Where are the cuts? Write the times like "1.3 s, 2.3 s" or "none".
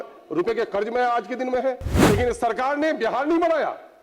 1.9 s